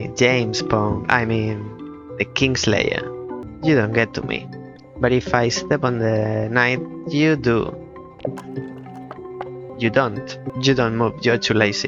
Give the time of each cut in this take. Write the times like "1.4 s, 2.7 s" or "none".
3.4 s, 9.7 s, 10.5 s